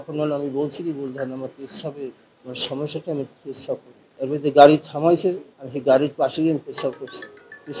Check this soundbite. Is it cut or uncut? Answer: cut